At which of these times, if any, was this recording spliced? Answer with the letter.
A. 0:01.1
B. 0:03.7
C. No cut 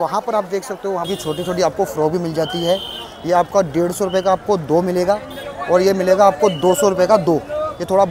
A